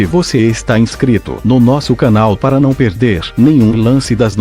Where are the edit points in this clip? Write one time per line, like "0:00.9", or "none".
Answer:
0:02.4